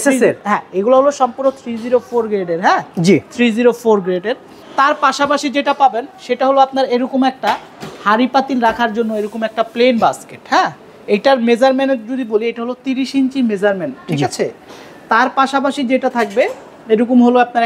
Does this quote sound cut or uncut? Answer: uncut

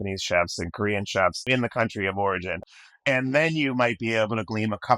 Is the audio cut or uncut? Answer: cut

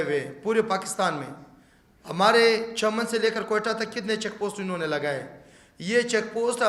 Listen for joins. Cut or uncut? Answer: uncut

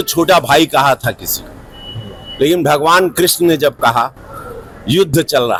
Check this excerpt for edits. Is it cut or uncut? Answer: uncut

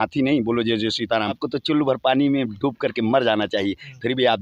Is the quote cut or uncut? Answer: cut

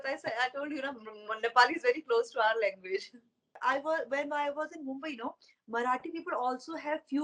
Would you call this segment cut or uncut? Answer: cut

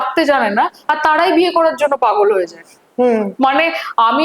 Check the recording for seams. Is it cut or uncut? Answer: uncut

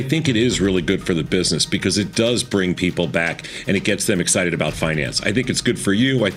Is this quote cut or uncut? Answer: uncut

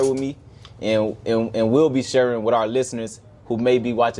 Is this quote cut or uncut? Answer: uncut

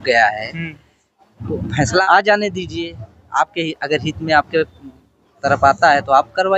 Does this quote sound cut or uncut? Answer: cut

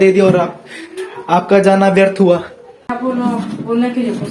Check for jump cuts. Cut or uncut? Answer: cut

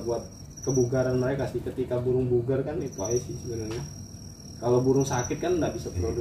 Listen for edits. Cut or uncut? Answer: uncut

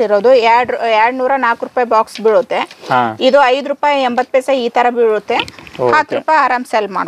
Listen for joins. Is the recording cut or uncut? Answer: uncut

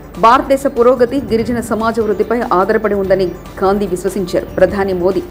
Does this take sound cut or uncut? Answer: uncut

